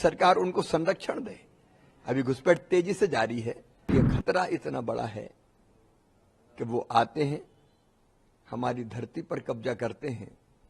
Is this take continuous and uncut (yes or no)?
no